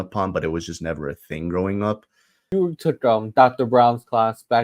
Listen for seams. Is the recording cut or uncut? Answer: cut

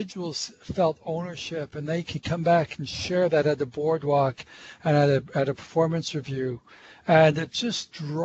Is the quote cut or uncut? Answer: uncut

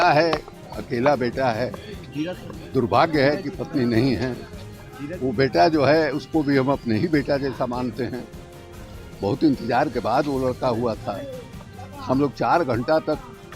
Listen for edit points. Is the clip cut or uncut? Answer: uncut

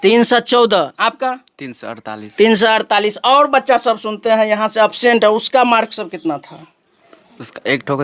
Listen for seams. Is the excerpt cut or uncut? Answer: uncut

